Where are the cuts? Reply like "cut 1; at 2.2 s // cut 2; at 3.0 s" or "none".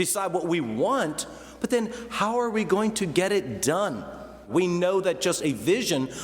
cut 1; at 4.5 s